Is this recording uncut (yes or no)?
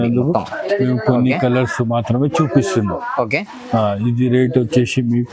yes